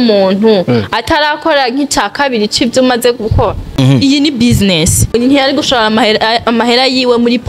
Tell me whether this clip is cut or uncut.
cut